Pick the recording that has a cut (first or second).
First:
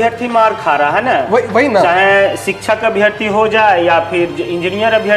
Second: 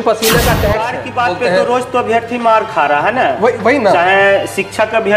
second